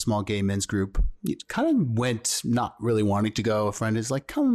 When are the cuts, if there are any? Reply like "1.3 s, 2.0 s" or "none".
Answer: none